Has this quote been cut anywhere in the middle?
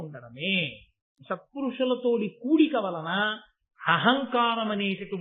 yes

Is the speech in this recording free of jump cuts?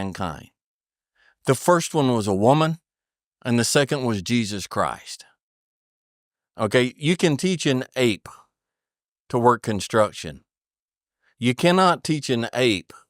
yes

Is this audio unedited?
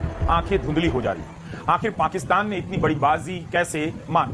yes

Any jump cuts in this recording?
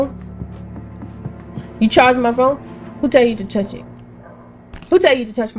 no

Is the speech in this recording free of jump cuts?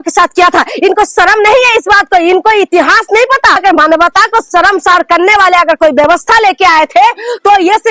no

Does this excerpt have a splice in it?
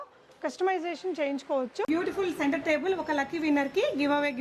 yes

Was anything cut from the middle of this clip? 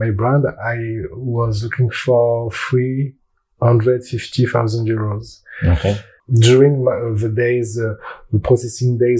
no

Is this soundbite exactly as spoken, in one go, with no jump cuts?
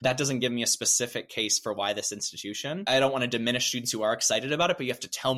yes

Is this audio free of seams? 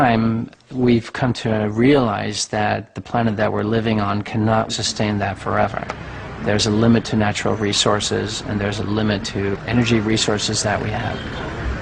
yes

